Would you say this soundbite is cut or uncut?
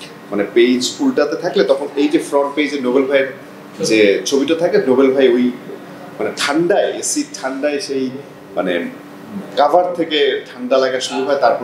uncut